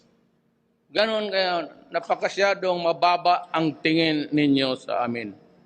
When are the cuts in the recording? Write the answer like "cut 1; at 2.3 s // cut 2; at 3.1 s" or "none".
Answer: cut 1; at 1.0 s